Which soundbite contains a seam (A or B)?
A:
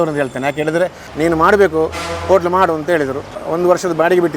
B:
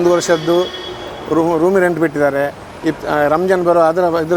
A